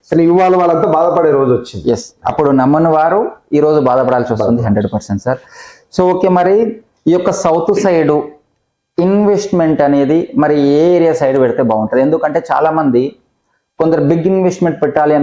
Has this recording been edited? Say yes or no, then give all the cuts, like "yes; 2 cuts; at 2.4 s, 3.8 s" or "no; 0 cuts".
no; 0 cuts